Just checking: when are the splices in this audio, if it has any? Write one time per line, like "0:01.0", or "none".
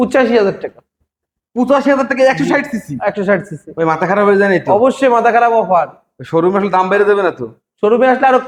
none